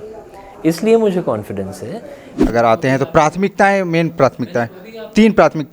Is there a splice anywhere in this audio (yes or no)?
yes